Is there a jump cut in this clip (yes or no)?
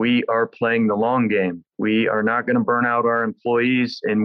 yes